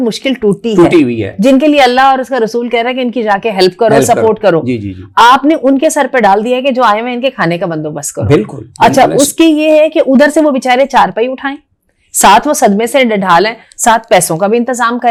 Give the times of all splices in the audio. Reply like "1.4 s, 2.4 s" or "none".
none

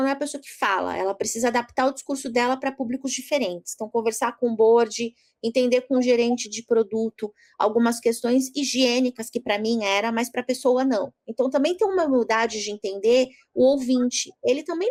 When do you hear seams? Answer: none

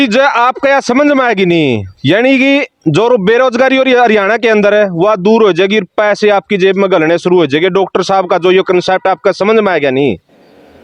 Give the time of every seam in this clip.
none

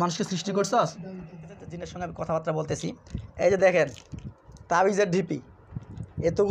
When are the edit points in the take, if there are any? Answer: 1.8 s

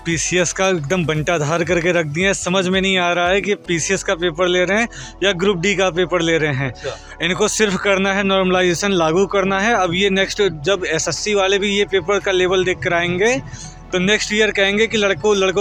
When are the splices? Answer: none

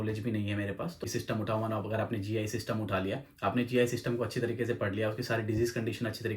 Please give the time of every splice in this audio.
1.0 s

